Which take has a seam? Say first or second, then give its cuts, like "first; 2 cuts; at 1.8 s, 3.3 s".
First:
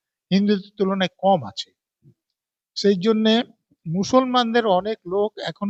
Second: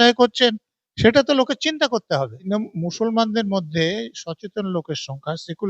second; 1 cut; at 2.4 s